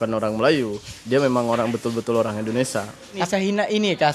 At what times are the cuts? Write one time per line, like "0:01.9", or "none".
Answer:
0:03.2

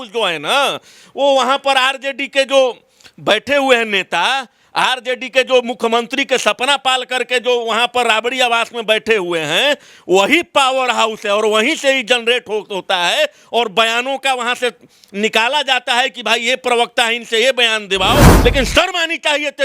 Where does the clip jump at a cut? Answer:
0:18.3

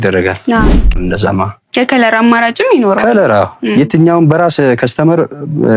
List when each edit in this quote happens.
0:01.0

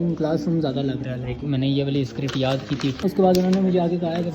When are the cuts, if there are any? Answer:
0:03.0

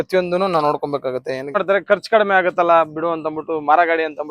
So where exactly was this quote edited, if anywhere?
0:01.5

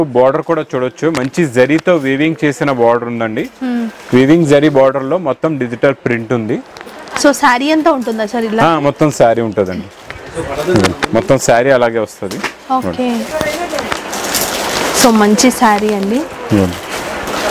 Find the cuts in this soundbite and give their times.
none

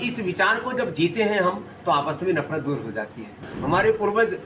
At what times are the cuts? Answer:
0:03.4

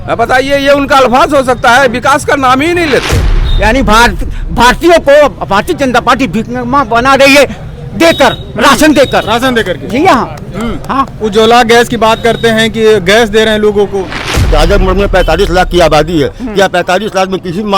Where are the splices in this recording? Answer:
0:03.4
0:14.5

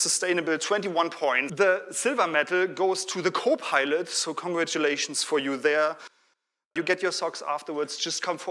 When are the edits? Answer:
0:01.4

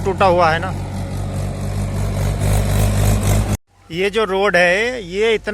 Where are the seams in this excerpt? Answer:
0:03.7

